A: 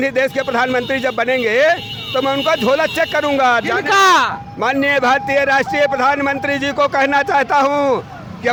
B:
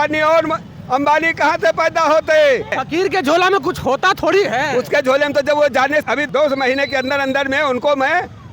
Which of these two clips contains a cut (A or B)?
B